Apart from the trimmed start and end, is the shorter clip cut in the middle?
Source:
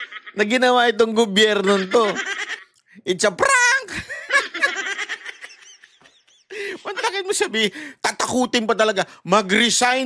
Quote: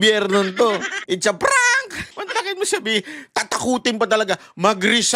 yes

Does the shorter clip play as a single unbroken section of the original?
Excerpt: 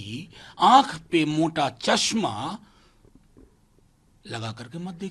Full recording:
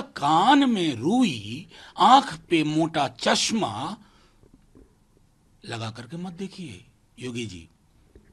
yes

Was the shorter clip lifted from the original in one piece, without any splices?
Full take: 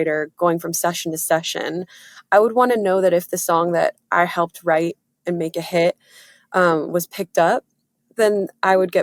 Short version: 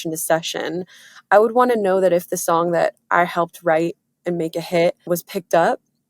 no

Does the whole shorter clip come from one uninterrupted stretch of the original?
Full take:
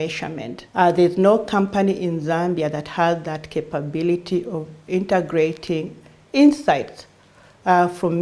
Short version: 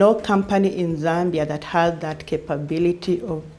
yes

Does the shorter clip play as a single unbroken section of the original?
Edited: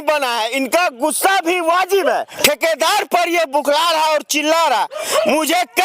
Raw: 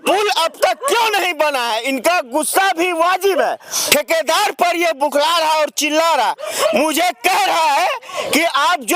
no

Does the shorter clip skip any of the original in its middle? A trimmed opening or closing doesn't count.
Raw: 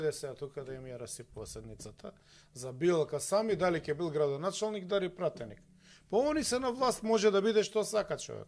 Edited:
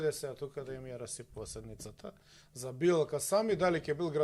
no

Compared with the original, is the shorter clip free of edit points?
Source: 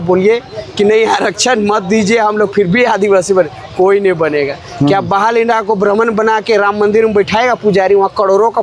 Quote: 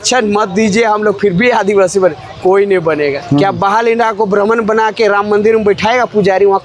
no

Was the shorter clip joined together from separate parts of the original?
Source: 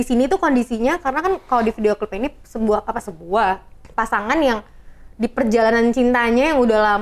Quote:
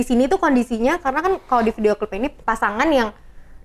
yes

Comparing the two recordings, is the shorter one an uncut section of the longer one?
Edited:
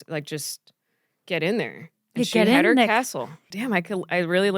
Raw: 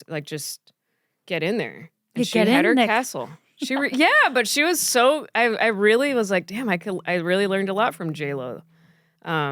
no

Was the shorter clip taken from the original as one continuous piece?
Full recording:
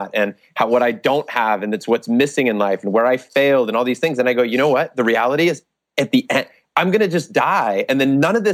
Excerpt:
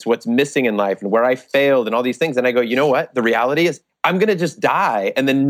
no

